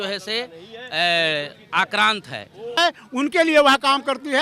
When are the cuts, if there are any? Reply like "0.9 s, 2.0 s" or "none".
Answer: 2.8 s